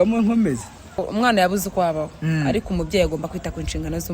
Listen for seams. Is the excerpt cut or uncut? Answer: cut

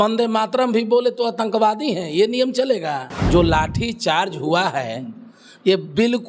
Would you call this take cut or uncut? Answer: cut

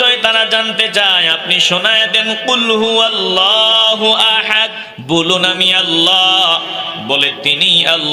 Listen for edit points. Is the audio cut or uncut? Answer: cut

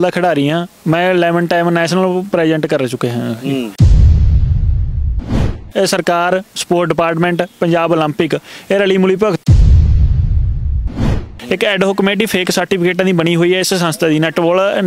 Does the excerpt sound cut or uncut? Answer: cut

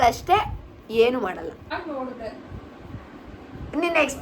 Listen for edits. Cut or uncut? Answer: cut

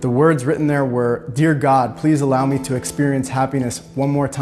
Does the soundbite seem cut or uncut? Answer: uncut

